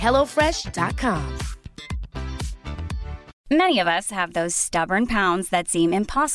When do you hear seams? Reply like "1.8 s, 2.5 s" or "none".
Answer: 3.2 s